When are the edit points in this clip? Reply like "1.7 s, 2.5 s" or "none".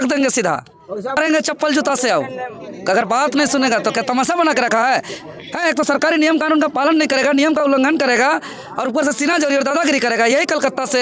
1.2 s

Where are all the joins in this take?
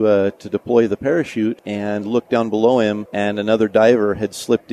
1.7 s, 3.1 s

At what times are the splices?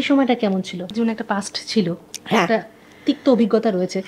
0.9 s

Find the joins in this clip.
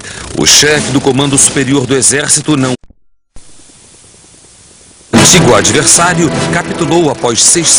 none

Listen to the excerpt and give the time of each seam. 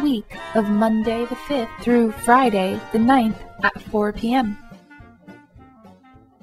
4.6 s

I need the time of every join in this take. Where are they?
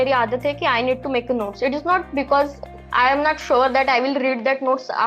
none

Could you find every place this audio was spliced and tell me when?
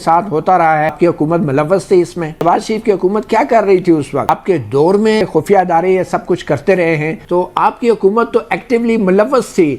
1.0 s, 2.4 s, 4.3 s, 5.2 s, 7.2 s

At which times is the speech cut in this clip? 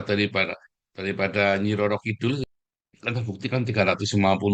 2.4 s

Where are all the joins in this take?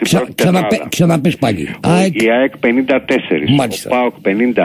none

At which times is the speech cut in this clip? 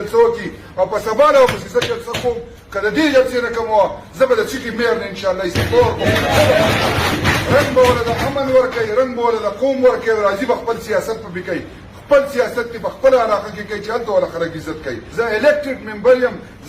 7.1 s, 15.0 s

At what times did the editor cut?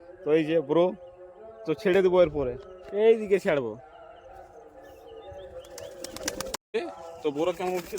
6.6 s

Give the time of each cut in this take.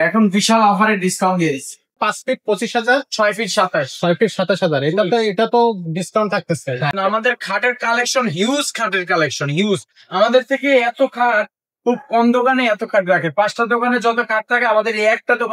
2.0 s, 6.9 s

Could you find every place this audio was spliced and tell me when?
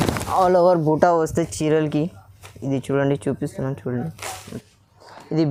none

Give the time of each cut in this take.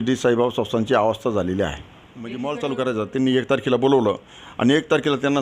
2.3 s

